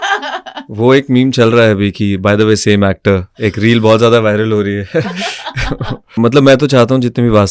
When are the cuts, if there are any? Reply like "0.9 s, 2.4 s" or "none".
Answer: 6.2 s